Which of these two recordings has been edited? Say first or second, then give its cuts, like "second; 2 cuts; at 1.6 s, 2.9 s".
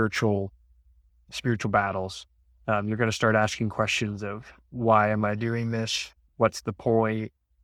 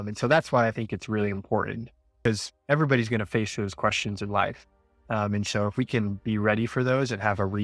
second; 1 cut; at 2.2 s